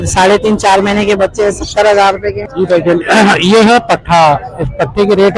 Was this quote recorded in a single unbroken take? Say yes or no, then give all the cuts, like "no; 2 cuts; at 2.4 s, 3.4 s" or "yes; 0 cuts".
no; 1 cut; at 2.4 s